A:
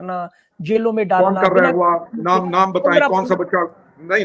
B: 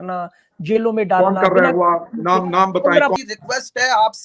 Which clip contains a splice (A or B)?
B